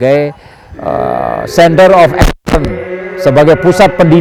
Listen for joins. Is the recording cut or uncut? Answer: uncut